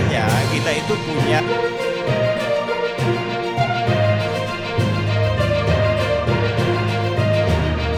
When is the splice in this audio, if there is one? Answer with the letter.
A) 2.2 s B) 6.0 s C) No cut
C